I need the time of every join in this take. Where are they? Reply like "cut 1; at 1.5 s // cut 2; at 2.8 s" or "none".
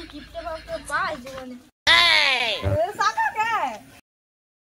cut 1; at 2.4 s